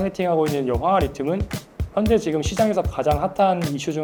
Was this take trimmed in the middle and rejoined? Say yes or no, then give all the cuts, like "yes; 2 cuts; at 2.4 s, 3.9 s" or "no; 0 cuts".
no; 0 cuts